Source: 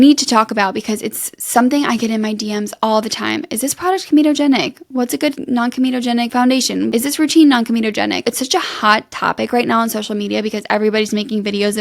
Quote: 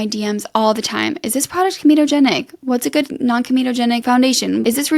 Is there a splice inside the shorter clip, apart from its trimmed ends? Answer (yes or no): no